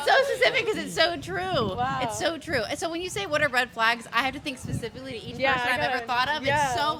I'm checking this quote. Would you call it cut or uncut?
uncut